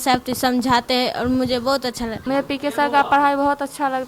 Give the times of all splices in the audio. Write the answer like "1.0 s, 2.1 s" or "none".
2.2 s